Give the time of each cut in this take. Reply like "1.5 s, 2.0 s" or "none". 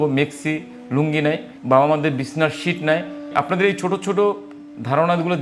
1.5 s, 3.2 s